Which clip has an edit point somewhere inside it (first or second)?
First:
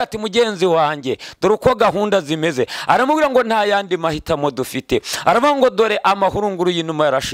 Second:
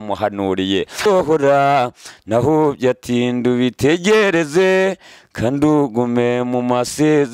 second